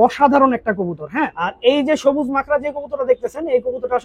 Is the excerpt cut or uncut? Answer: cut